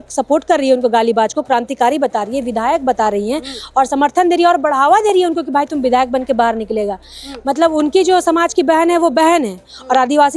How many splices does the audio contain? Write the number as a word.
zero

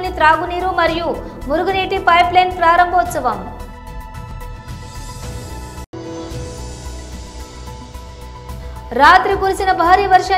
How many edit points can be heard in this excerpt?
zero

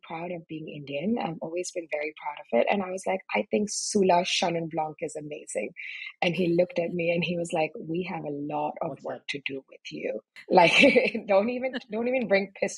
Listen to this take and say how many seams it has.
one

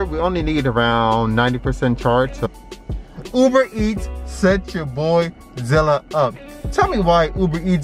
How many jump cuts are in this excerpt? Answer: one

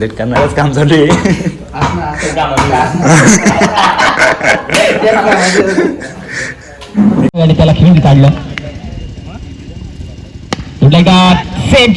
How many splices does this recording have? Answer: one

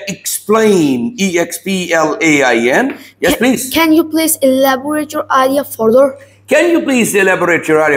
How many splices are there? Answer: zero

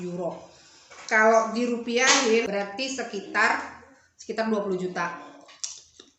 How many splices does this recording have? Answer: one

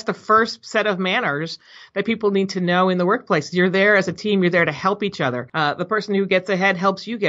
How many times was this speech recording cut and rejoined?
one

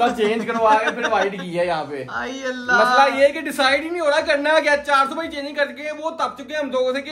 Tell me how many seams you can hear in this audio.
zero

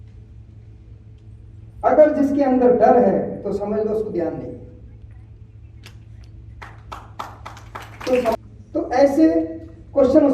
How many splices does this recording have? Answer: one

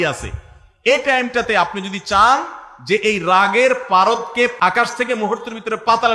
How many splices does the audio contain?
one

